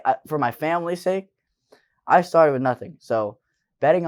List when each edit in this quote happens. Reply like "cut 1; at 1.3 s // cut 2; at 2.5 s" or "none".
none